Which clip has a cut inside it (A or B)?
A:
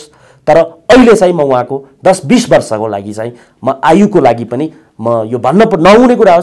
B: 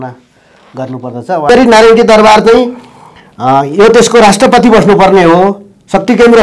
B